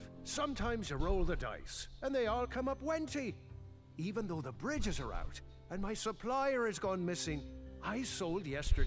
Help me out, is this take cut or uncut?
uncut